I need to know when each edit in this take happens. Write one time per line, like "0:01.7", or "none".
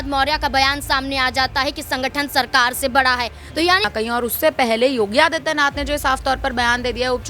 0:03.9